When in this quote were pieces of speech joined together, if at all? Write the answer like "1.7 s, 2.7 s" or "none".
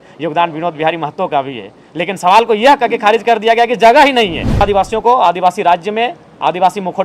4.6 s